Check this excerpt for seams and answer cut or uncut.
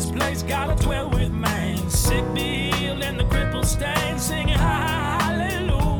uncut